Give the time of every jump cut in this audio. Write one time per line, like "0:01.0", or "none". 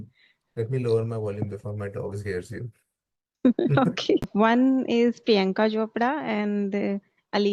0:04.3